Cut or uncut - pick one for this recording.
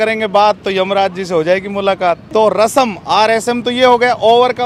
uncut